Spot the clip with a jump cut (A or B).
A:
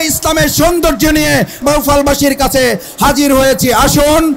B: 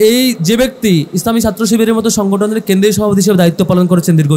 A